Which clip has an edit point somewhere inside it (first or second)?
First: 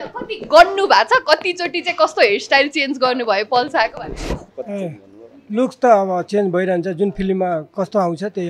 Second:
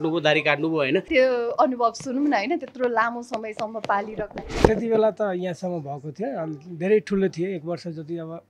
second